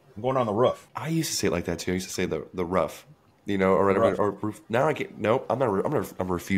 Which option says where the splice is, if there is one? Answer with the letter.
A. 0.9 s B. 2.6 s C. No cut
A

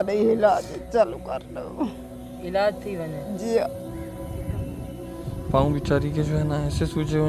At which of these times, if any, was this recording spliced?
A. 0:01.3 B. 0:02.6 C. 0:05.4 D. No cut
C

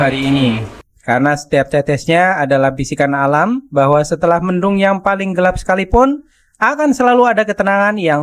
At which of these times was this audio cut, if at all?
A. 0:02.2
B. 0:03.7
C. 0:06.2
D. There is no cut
D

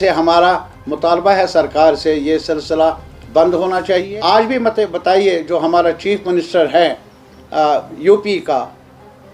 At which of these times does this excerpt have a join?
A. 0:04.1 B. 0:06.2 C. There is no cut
A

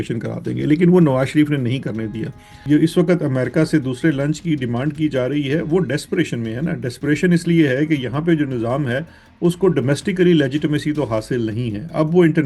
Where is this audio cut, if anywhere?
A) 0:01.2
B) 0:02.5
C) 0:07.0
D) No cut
B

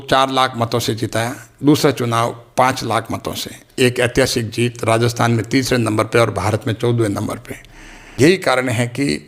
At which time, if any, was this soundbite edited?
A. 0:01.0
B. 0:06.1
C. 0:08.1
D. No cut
C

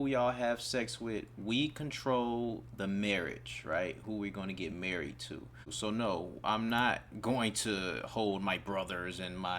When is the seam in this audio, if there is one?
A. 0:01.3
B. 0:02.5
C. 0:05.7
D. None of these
C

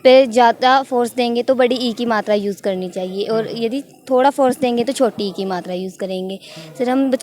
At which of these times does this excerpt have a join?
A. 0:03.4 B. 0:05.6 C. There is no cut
C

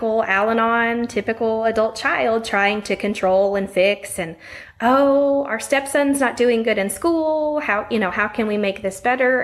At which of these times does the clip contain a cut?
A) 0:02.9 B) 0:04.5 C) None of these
C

